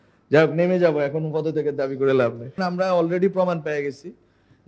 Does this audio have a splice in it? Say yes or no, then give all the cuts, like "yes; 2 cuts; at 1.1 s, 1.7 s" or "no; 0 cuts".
yes; 1 cut; at 2.6 s